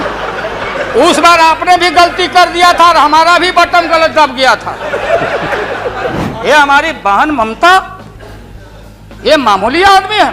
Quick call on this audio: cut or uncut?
cut